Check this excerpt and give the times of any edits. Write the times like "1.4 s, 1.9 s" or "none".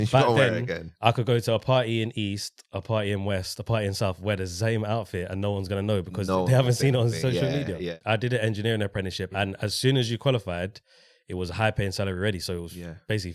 7.9 s

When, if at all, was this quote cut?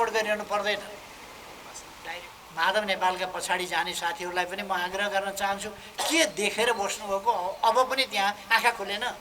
2.1 s

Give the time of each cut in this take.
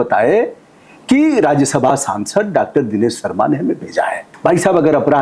4.2 s

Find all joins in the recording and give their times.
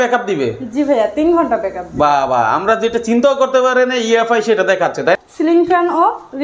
5.3 s

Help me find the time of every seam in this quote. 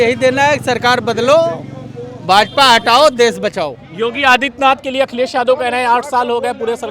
none

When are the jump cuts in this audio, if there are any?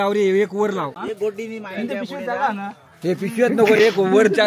1.0 s

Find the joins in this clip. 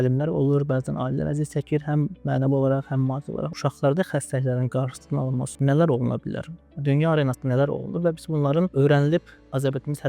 3.5 s, 8.7 s

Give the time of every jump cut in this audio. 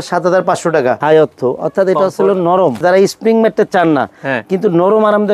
1.0 s, 2.8 s

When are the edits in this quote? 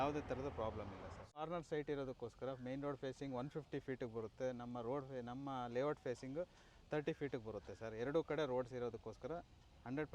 1.3 s

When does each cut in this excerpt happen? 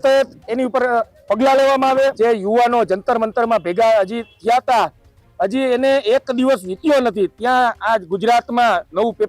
2.1 s

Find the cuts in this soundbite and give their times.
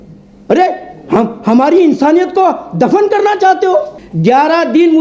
4.0 s

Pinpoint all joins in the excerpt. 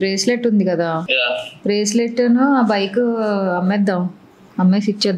1.1 s

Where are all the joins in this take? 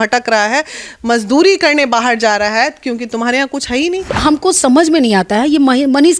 4.1 s

